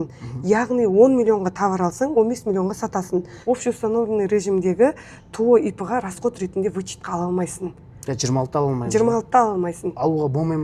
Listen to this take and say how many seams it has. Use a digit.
1